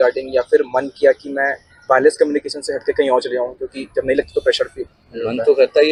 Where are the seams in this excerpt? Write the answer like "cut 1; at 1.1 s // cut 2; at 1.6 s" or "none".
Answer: none